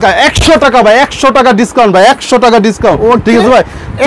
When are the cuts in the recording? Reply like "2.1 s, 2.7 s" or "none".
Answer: none